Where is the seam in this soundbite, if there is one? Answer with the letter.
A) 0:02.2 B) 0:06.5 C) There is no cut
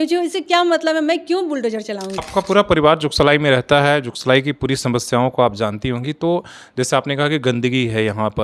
A